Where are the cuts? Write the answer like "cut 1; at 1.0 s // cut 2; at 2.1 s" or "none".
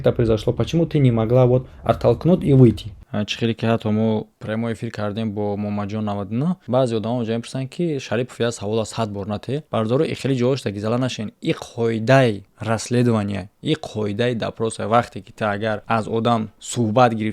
cut 1; at 3.0 s // cut 2; at 9.6 s // cut 3; at 12.5 s // cut 4; at 15.8 s